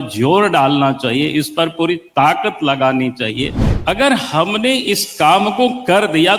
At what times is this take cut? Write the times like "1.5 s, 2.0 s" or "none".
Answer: 3.7 s

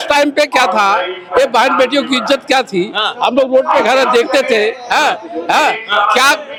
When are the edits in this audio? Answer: none

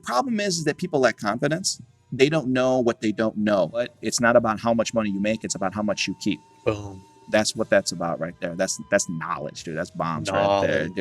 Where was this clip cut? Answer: 4.0 s

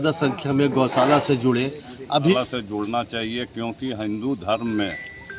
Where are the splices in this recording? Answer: 2.3 s

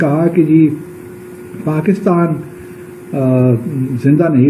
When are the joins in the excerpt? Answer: none

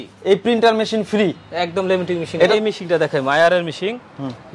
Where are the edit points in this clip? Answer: 2.4 s

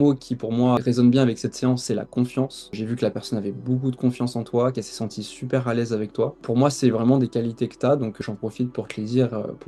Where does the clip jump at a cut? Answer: none

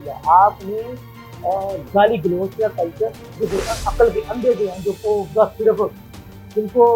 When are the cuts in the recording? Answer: 3.4 s

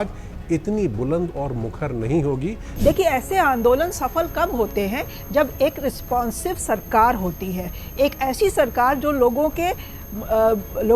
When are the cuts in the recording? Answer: 2.7 s

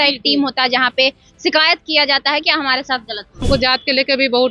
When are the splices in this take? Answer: 3.4 s

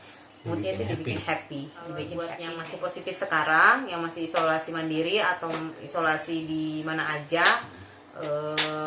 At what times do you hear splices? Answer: 2.2 s

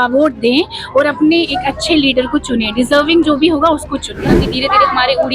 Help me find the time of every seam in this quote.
4.5 s

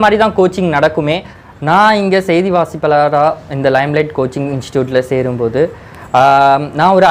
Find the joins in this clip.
1.3 s

